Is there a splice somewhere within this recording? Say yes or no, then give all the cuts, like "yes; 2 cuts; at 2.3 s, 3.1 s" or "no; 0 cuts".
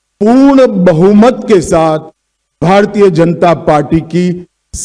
no; 0 cuts